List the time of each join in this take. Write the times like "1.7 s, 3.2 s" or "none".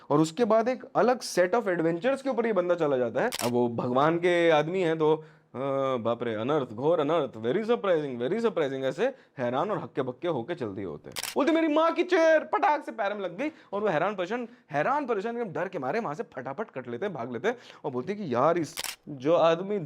3.4 s, 11.1 s, 18.8 s